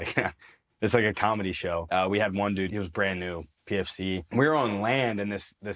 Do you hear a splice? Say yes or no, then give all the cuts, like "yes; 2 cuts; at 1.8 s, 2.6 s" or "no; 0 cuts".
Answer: yes; 3 cuts; at 1.8 s, 2.7 s, 4.2 s